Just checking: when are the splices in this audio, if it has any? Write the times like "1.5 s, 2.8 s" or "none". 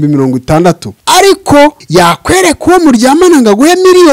0.9 s, 1.8 s